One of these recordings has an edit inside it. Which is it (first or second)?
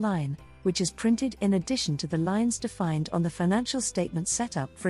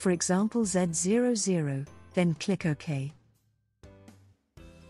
second